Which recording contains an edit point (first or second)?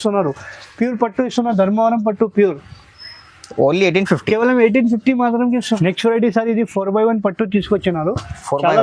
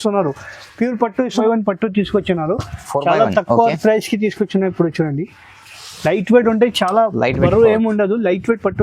second